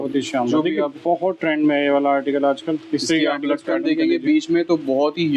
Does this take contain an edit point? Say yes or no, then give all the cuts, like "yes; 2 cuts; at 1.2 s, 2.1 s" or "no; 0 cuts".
no; 0 cuts